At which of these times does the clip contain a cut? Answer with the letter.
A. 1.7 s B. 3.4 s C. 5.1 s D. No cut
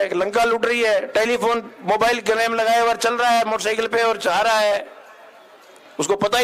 D